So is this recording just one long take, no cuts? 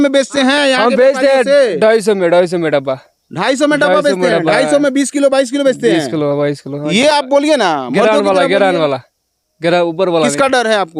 yes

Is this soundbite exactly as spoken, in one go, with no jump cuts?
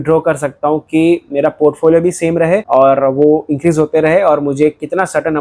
yes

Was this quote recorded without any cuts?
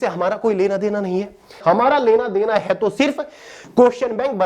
no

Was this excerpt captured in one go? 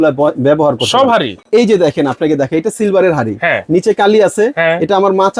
yes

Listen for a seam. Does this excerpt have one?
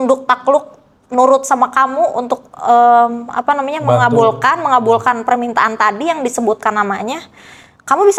no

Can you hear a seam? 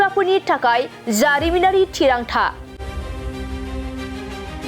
yes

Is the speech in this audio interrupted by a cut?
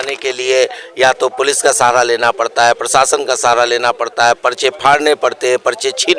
no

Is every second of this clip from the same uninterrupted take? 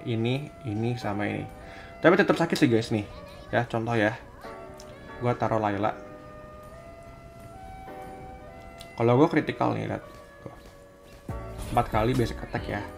yes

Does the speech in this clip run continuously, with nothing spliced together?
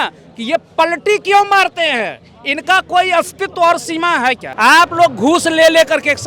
no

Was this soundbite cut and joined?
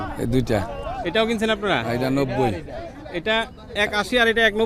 no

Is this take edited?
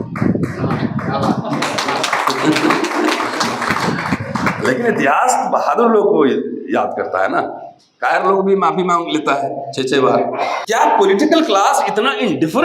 yes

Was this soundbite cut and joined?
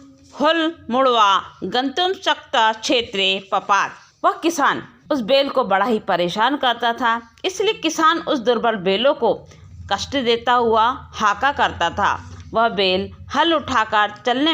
yes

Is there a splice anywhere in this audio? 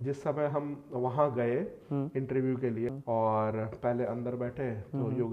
yes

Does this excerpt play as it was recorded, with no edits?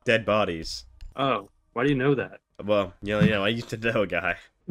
yes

